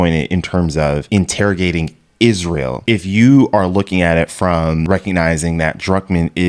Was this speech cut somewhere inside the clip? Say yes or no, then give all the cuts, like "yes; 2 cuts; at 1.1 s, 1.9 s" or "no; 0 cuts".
yes; 3 cuts; at 1.1 s, 2.8 s, 4.8 s